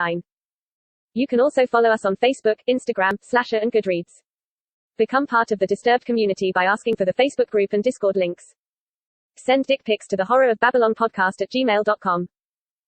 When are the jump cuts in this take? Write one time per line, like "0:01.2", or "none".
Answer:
none